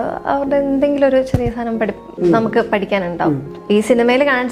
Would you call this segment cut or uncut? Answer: cut